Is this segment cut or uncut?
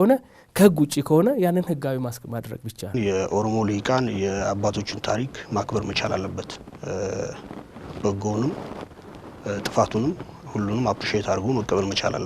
cut